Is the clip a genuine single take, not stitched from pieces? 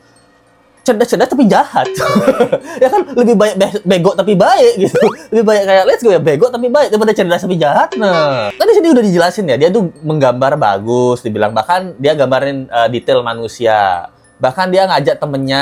yes; 0 cuts

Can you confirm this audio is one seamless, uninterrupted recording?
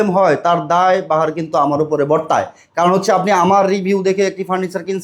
yes; 0 cuts

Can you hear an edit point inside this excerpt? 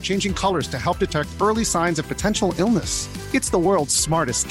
no; 0 cuts

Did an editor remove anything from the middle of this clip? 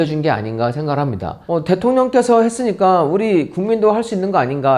yes; 1 cut; at 1.4 s

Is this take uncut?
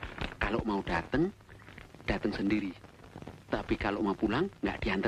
yes; 0 cuts

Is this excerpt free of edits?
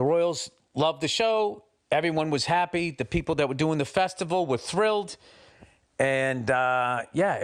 yes; 0 cuts

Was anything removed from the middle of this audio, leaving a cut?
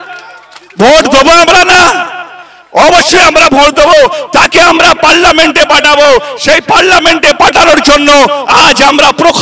no; 0 cuts

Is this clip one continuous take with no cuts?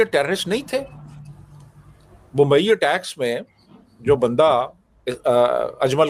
yes; 0 cuts

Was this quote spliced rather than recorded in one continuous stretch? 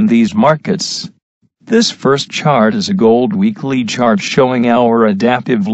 yes; 1 cut; at 3.0 s

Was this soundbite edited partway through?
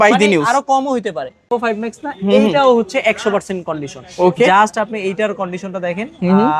yes; 1 cut; at 1.5 s

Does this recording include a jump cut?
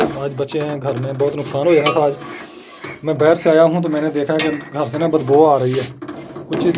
no; 0 cuts

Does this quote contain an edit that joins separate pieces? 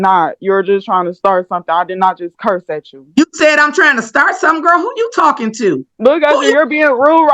yes; 1 cut; at 5.9 s

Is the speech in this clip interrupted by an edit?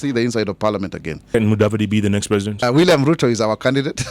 yes; 2 cuts; at 1.2 s, 2.6 s

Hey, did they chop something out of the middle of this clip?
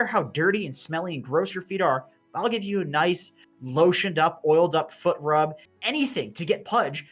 yes; 1 cut; at 5.7 s

